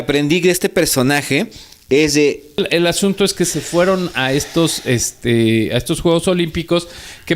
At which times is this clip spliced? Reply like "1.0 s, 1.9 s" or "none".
2.6 s

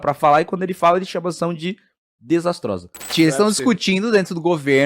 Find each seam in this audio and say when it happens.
3.1 s

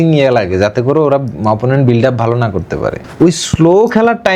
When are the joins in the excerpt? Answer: 3.0 s

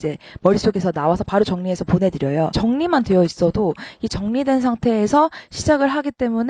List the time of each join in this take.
2.5 s

